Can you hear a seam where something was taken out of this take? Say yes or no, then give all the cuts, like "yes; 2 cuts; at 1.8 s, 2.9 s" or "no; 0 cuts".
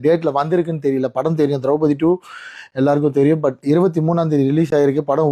no; 0 cuts